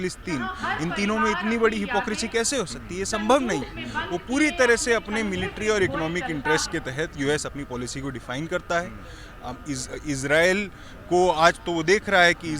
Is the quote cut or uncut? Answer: uncut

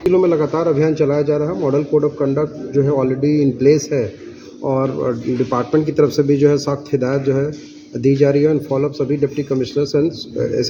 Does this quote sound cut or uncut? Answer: uncut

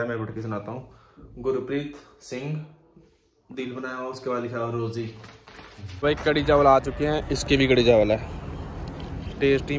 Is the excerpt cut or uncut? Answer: cut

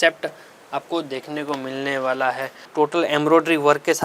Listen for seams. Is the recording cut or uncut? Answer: cut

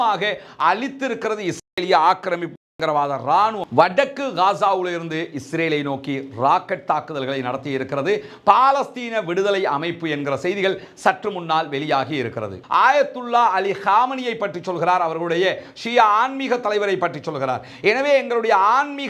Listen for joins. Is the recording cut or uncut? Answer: cut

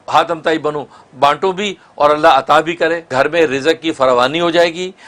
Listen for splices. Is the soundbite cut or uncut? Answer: cut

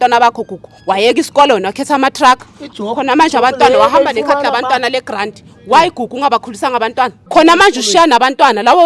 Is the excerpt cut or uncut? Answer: cut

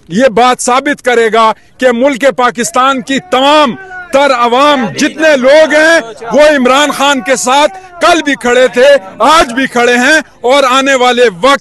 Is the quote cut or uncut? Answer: uncut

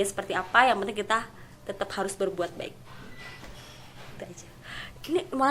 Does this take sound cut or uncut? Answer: uncut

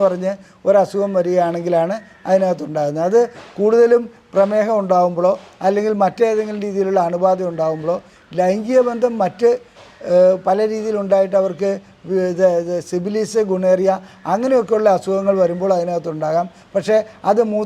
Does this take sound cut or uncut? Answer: uncut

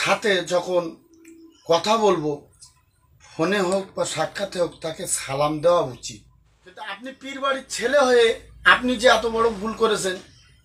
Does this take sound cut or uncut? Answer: cut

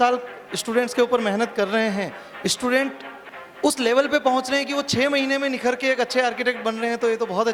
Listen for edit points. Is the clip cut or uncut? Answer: uncut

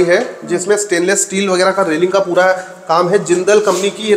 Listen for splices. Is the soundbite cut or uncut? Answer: uncut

